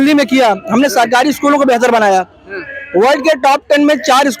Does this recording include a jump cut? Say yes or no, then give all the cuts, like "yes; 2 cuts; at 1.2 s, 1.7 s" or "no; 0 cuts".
no; 0 cuts